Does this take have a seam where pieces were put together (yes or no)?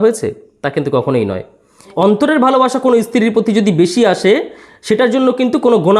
yes